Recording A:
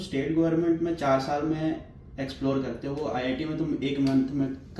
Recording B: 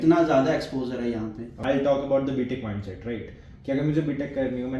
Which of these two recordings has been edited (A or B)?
B